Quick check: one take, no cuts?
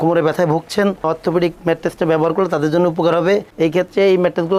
yes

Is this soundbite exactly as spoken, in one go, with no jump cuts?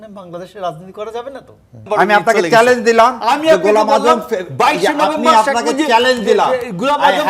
no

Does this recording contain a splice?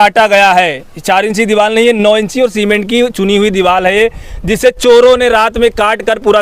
no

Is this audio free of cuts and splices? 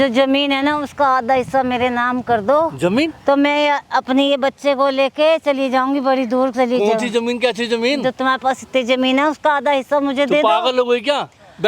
yes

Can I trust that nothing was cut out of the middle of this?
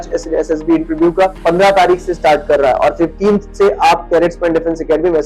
no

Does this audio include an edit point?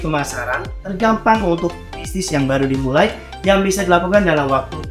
no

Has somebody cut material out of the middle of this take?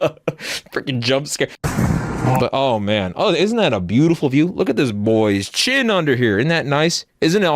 yes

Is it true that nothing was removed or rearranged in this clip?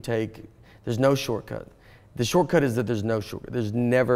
yes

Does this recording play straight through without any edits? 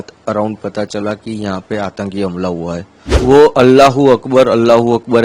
no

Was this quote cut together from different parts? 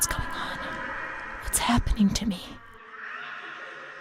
yes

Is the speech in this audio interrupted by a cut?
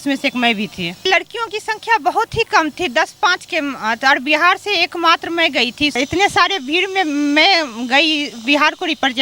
yes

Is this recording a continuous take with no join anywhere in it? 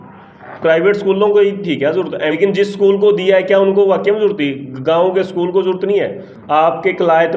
yes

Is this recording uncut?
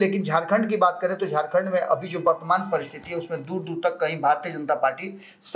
yes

